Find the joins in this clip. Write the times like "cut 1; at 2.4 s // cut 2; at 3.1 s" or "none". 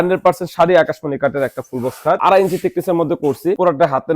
cut 1; at 2.2 s